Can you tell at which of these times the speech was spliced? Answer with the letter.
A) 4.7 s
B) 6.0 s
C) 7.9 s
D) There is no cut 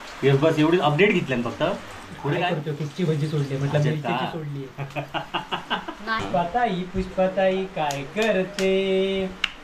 B